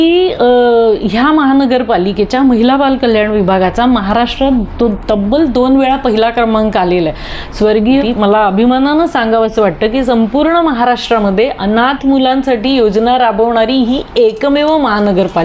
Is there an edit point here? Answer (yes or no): yes